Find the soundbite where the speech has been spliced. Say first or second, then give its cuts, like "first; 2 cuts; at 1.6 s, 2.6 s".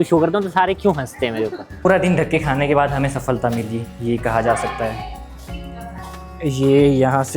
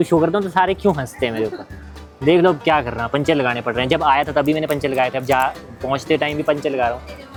first; 1 cut; at 1.8 s